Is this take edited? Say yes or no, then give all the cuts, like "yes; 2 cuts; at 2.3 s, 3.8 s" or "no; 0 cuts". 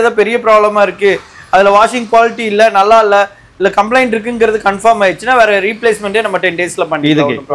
no; 0 cuts